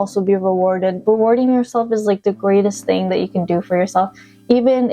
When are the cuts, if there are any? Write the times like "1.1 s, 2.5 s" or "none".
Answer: 1.0 s